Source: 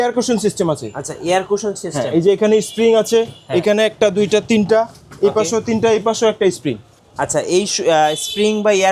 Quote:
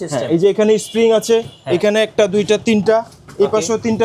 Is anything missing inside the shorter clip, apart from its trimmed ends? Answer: no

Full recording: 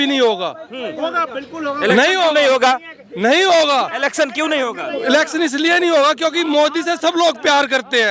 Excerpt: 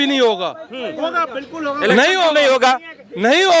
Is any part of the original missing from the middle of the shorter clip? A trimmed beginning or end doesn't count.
no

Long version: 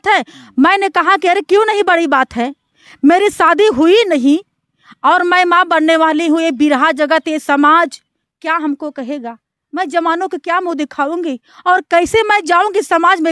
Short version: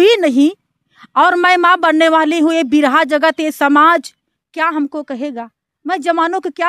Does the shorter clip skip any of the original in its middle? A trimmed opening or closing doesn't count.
no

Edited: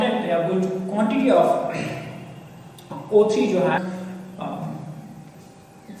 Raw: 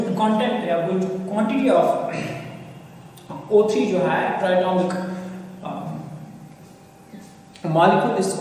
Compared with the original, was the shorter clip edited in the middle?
yes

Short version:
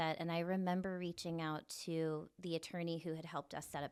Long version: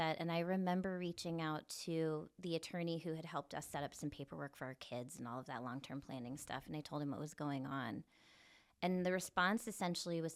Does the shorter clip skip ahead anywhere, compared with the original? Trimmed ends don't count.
no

